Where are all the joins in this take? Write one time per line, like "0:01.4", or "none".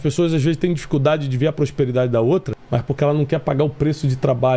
0:02.6